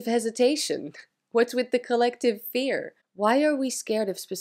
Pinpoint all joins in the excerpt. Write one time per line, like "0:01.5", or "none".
none